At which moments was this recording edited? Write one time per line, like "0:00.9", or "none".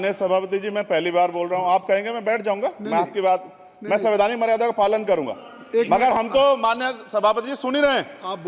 none